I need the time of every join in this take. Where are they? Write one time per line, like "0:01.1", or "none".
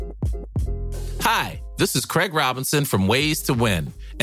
0:01.2